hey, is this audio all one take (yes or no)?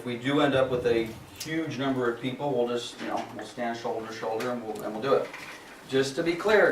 no